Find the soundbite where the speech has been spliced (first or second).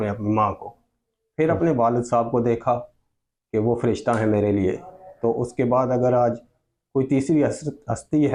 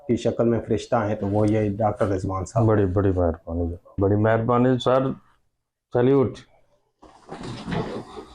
second